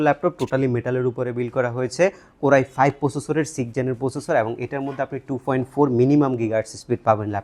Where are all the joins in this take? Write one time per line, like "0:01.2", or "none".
none